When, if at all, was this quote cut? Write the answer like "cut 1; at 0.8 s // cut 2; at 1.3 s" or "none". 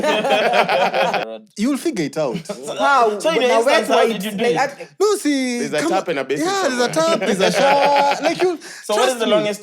cut 1; at 1.2 s